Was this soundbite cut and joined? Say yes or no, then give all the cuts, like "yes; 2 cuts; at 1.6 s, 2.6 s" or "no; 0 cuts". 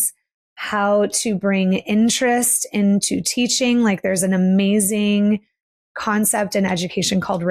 no; 0 cuts